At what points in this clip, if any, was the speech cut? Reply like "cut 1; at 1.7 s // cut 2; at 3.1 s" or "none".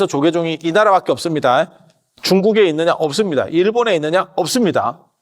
cut 1; at 2.1 s